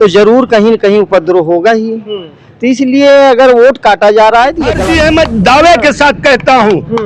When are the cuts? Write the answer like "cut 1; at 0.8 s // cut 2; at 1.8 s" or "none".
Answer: cut 1; at 4.7 s